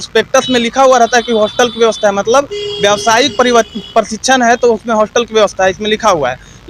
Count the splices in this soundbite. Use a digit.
0